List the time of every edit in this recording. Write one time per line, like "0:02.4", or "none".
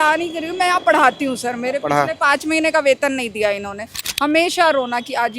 0:04.0